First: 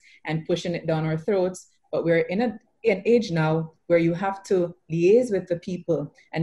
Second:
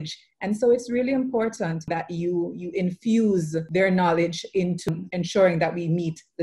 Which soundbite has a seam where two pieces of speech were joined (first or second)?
second